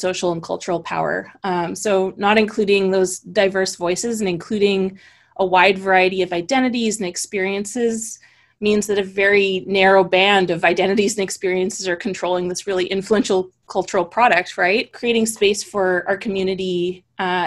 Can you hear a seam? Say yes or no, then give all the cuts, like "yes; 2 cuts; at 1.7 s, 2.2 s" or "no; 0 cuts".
yes; 1 cut; at 14.9 s